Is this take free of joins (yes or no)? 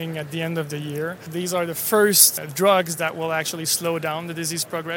no